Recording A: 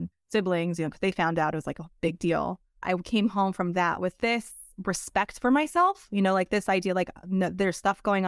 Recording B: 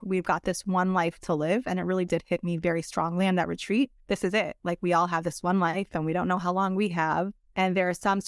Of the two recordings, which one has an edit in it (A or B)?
A